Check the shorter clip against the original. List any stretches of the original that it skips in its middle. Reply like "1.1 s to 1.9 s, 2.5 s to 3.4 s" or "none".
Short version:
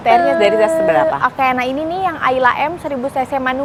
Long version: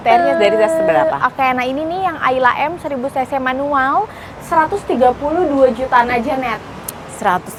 none